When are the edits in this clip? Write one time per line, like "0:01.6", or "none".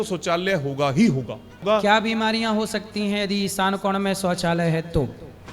0:01.6

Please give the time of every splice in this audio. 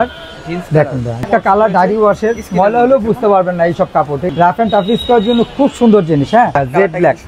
0:01.3
0:04.2
0:06.6

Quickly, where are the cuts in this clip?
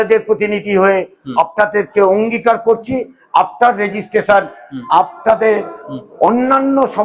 none

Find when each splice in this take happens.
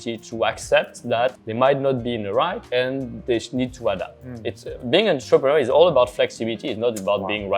none

